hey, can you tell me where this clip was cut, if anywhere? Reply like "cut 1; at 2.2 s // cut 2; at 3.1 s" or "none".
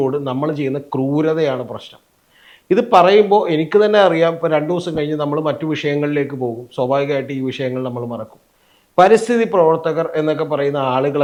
none